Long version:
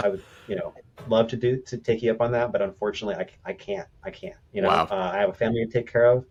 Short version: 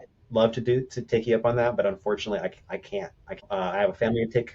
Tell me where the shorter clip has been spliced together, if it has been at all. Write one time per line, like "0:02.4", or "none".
0:03.5

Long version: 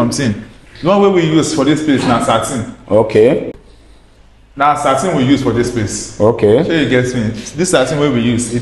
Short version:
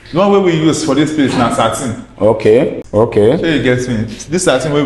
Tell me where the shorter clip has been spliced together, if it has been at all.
0:02.8

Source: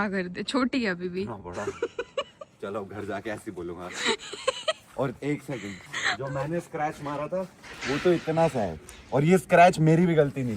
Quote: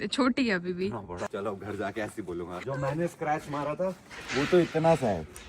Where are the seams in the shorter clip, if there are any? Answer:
0:01.3
0:02.6

